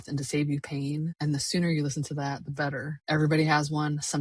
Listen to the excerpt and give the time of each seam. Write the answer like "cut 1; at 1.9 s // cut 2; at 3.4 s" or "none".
cut 1; at 1.2 s // cut 2; at 2.9 s